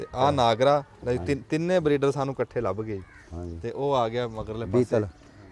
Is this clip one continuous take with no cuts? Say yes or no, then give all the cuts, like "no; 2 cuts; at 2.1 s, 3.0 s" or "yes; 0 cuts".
yes; 0 cuts